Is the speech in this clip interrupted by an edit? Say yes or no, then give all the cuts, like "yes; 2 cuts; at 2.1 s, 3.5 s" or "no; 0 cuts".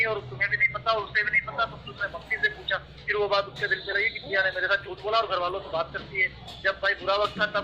no; 0 cuts